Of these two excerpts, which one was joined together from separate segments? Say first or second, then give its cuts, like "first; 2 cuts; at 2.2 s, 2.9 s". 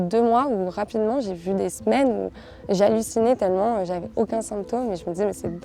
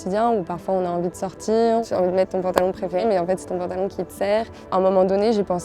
second; 3 cuts; at 1.8 s, 3.0 s, 4.6 s